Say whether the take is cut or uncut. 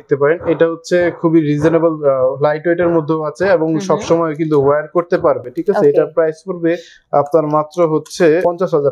uncut